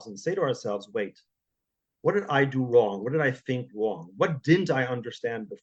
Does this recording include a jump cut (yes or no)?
no